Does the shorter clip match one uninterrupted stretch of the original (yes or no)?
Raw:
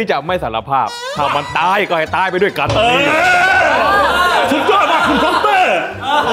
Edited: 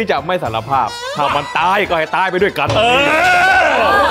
yes